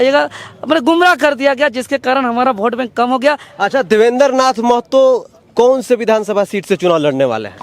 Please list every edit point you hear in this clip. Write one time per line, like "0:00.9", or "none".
0:03.5